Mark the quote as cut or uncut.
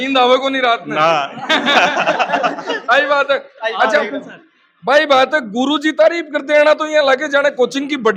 uncut